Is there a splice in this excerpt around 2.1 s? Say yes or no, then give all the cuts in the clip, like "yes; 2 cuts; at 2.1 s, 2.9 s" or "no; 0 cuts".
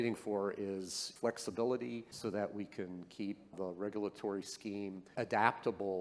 yes; 4 cuts; at 1.1 s, 2.1 s, 3.5 s, 5.1 s